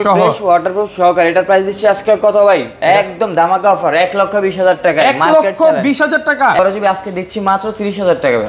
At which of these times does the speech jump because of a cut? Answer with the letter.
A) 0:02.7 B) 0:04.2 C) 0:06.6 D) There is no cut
C